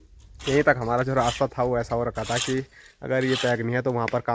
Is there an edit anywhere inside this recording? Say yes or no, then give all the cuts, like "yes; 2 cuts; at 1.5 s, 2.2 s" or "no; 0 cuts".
no; 0 cuts